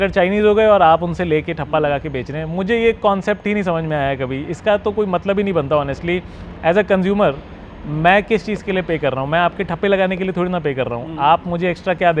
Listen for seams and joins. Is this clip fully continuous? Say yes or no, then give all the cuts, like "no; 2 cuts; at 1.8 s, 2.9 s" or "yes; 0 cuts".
yes; 0 cuts